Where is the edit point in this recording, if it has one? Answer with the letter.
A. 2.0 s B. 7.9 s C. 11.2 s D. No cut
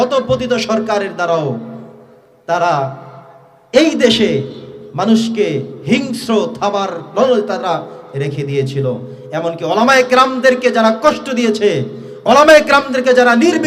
D